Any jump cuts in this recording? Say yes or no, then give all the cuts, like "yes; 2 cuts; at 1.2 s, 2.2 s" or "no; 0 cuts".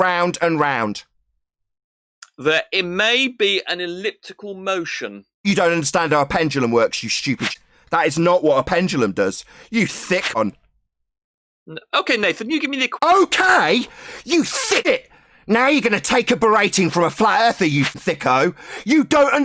yes; 4 cuts; at 7.5 s, 10.4 s, 14.8 s, 18.0 s